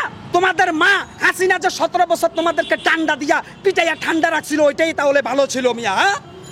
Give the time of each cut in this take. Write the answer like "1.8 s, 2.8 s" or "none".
none